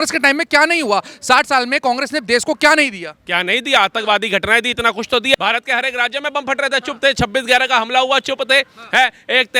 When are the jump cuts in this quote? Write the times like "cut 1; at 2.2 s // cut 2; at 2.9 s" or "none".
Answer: cut 1; at 5.4 s